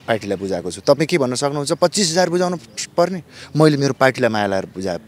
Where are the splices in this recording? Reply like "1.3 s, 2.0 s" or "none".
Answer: none

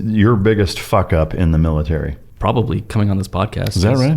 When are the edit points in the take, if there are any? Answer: 2.2 s

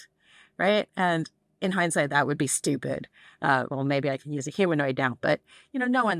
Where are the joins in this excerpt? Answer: none

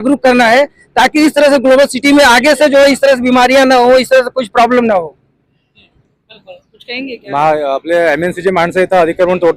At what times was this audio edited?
none

